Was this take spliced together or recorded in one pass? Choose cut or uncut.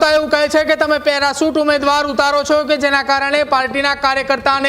uncut